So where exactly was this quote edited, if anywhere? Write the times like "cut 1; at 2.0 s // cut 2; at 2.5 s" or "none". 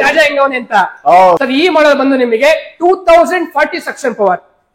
cut 1; at 1.4 s